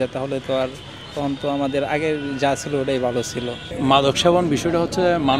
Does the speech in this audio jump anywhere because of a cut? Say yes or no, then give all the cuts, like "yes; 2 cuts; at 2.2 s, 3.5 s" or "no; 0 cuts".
yes; 1 cut; at 3.6 s